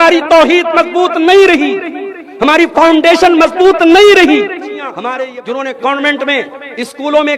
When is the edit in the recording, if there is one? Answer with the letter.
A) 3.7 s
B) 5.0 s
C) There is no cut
B